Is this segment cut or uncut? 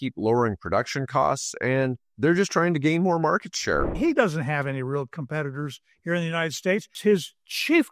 cut